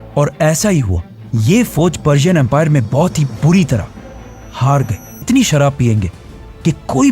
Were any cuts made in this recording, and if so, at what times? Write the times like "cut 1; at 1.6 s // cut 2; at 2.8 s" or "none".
cut 1; at 5.2 s